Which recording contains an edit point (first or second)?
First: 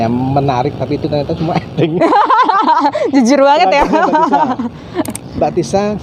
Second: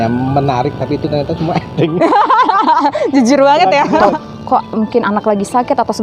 second